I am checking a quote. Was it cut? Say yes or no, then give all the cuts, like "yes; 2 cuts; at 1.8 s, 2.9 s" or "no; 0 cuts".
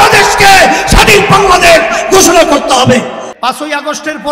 yes; 1 cut; at 3.2 s